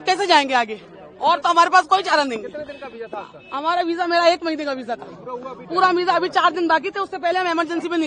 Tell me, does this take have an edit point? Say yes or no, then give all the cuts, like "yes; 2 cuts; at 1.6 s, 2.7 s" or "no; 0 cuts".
no; 0 cuts